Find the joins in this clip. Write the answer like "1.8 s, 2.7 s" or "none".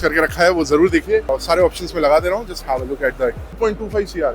1.3 s, 3.5 s